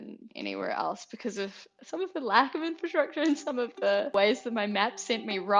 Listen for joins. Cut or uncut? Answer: cut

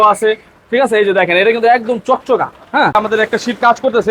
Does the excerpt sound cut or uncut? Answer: cut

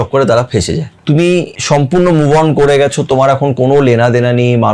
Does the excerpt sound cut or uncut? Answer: cut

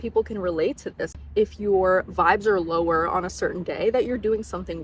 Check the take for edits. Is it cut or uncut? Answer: cut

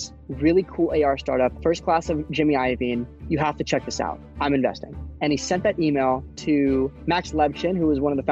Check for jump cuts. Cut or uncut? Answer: cut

